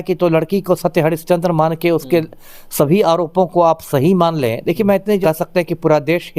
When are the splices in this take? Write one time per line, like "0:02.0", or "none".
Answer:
0:05.2